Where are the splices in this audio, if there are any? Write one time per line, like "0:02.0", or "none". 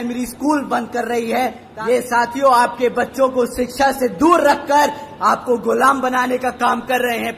0:01.6